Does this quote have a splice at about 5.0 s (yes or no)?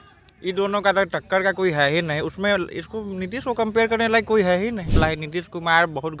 yes